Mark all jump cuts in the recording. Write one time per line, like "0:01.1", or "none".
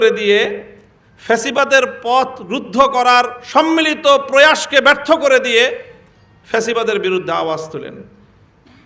none